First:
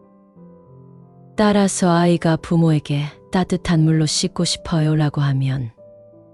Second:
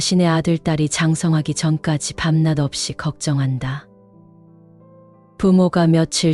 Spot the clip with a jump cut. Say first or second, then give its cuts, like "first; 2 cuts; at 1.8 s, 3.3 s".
second; 2 cuts; at 3.8 s, 5.4 s